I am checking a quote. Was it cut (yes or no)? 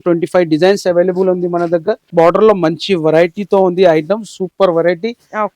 yes